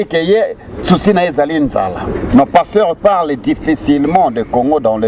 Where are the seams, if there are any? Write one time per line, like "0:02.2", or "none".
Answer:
0:02.3